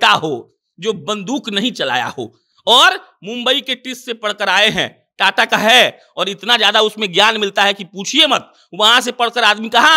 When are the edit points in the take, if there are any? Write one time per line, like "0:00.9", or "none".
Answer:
none